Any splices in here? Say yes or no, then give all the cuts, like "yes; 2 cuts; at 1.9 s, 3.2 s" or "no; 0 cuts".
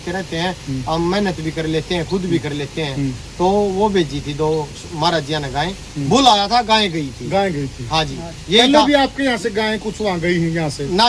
no; 0 cuts